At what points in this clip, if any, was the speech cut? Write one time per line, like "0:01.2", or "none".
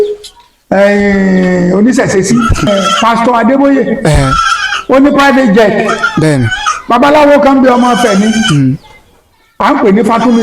0:02.7